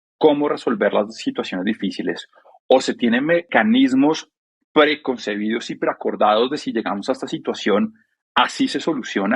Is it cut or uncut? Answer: cut